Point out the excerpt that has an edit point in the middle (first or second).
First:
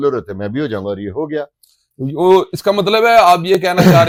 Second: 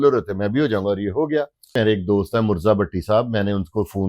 second